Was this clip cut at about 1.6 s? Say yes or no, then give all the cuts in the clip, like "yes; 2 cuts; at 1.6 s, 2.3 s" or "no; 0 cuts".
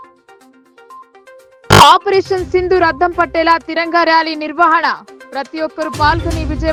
no; 0 cuts